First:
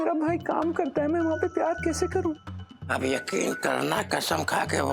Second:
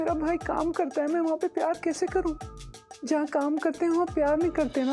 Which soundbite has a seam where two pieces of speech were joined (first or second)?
first